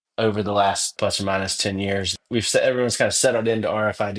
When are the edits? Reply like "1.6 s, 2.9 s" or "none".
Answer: 0.9 s, 2.2 s